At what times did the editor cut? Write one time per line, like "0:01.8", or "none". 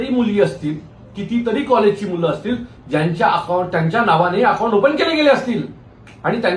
none